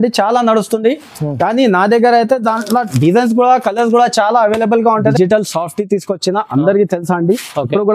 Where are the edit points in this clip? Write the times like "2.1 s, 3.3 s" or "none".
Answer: 5.1 s